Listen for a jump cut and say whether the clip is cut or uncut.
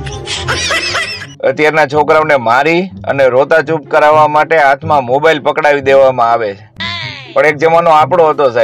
uncut